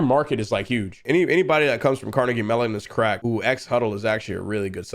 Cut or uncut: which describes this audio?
cut